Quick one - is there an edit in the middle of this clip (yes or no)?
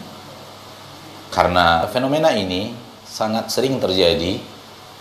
yes